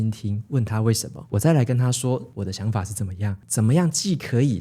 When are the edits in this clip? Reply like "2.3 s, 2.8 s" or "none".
1.2 s, 3.4 s